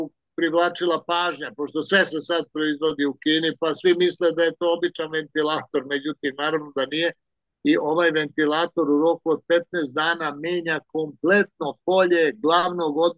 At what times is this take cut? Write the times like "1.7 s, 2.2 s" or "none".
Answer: none